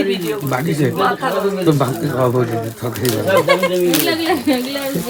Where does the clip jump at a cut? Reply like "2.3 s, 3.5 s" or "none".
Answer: none